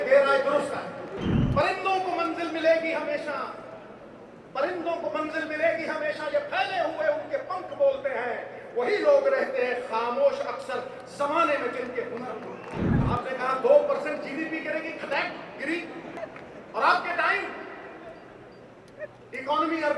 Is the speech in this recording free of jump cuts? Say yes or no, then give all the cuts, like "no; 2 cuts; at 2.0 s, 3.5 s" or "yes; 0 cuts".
no; 3 cuts; at 1.3 s, 12.8 s, 16.1 s